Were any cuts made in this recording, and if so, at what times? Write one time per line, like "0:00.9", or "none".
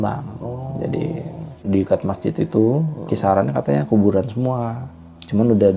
0:01.6